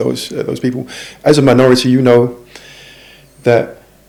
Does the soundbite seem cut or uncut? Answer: uncut